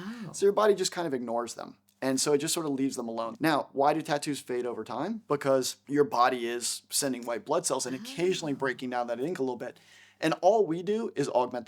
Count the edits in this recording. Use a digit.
2